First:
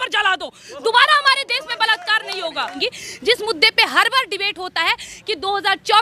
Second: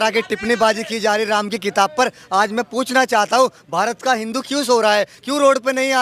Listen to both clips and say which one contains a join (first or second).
first